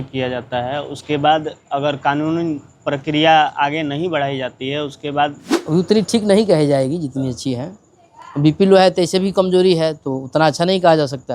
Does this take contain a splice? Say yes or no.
yes